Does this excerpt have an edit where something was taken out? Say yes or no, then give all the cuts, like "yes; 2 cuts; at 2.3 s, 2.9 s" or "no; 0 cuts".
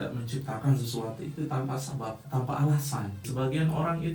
yes; 1 cut; at 3.2 s